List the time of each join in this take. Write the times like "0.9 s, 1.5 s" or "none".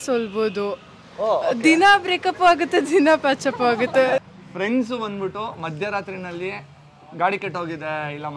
4.2 s